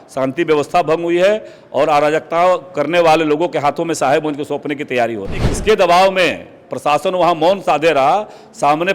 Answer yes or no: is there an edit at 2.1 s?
no